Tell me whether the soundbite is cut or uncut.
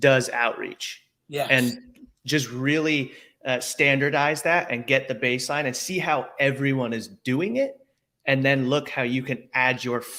uncut